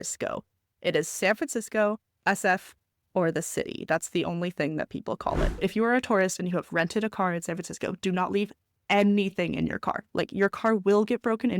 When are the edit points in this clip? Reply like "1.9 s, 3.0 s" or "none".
5.6 s, 10.0 s